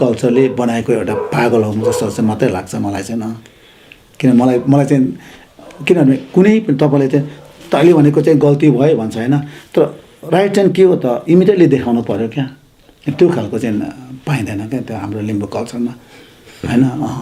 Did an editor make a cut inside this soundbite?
no; 0 cuts

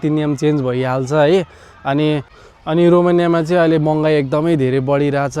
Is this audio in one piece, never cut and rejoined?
no; 1 cut; at 2.4 s

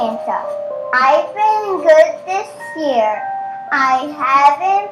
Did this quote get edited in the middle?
no; 0 cuts

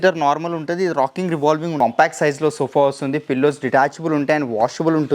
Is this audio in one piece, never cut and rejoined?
no; 1 cut; at 1.7 s

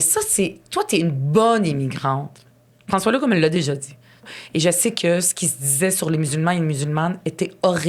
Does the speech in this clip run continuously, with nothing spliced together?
no; 1 cut; at 4.2 s

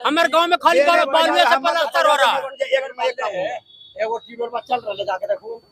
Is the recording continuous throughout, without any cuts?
yes; 0 cuts

